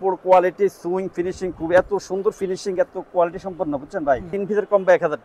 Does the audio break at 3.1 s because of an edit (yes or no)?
no